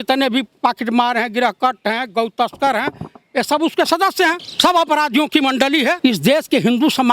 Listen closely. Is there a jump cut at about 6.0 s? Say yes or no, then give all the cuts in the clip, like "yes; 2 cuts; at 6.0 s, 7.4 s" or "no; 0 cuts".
yes; 2 cuts; at 4.5 s, 6.0 s